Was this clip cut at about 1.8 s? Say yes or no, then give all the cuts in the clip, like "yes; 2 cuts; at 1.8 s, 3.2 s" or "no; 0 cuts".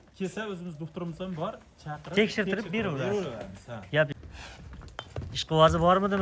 no; 1 cut; at 4.1 s